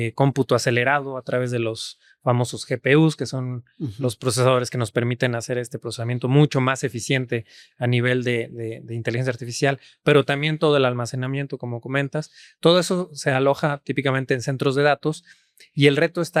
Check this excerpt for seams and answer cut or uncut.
uncut